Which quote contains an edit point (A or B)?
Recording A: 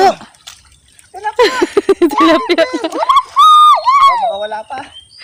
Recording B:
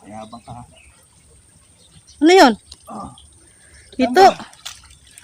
B